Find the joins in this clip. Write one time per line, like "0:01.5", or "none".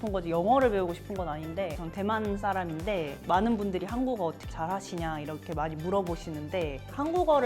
0:01.8
0:03.2